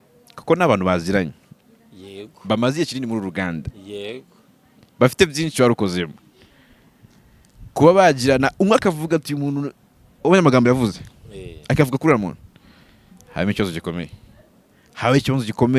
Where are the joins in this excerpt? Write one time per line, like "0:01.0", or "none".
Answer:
none

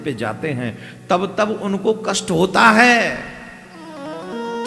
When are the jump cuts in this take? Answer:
none

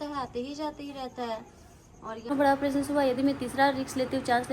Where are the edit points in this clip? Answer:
0:02.3

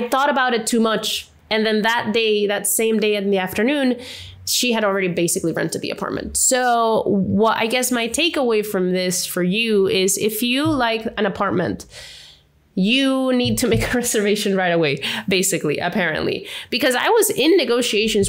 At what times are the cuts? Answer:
none

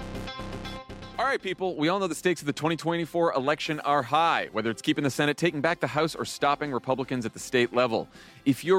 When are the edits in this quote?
0:00.9

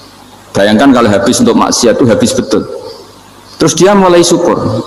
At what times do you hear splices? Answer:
none

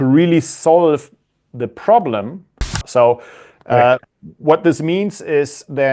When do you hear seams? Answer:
0:02.8

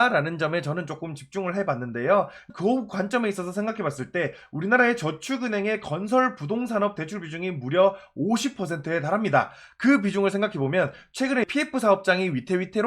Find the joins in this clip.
none

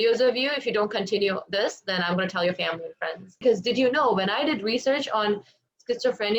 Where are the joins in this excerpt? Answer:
0:03.4

